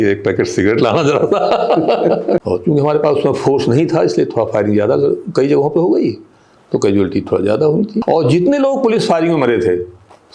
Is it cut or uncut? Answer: cut